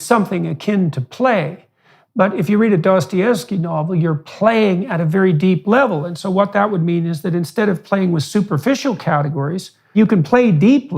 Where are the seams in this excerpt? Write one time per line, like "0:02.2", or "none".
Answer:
0:10.0